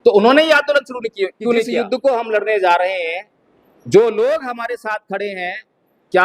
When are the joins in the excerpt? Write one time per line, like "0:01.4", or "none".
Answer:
0:01.8